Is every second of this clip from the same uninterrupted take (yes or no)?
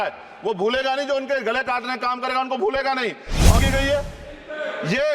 no